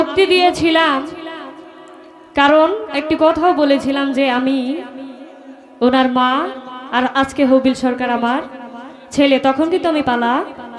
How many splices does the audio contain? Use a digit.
0